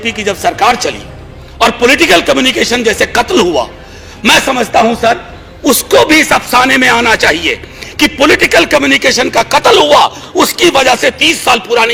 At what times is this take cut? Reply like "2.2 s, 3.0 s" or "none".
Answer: none